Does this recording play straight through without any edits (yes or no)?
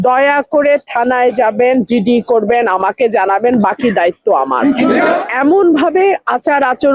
no